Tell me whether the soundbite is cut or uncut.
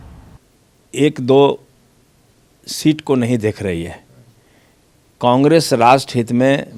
uncut